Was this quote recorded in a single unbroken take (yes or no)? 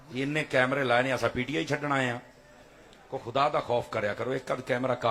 yes